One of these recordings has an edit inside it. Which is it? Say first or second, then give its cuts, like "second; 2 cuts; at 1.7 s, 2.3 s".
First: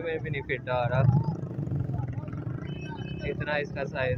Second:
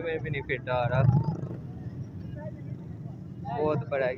second; 1 cut; at 1.5 s